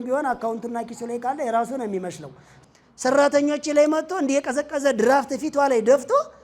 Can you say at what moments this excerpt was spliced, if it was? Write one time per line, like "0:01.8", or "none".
0:02.5